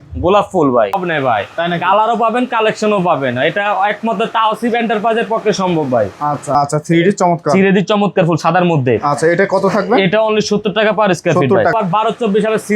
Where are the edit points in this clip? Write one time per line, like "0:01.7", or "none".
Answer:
0:01.0
0:06.5
0:11.7